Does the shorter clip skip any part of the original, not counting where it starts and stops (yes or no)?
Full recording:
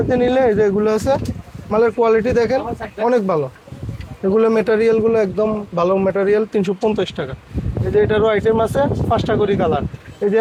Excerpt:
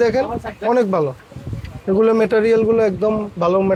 no